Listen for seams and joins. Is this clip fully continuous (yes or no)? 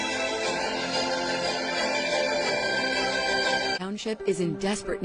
no